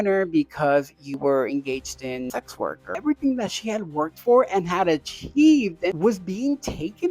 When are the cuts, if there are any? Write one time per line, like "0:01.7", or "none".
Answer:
0:02.9
0:05.9